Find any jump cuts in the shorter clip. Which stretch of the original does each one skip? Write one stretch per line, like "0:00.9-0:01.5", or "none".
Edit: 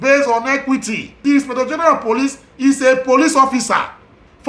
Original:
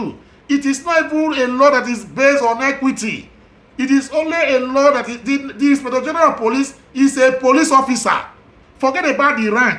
0:03.3-0:05.5